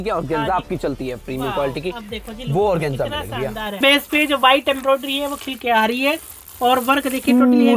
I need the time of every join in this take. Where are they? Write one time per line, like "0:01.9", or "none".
0:03.8